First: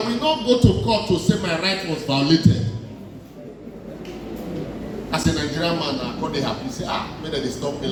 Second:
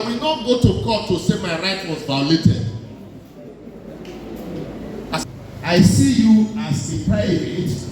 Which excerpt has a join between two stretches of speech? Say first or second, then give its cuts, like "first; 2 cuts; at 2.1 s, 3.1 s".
second; 1 cut; at 5.2 s